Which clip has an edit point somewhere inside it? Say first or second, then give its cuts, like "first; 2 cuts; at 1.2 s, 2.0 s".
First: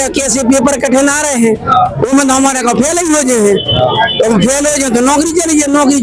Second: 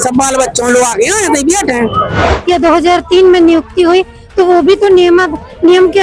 second; 1 cut; at 2.2 s